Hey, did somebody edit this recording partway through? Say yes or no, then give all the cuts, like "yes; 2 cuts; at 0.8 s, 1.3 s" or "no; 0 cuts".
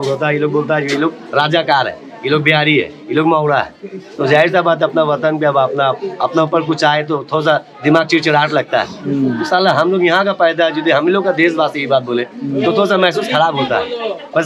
no; 0 cuts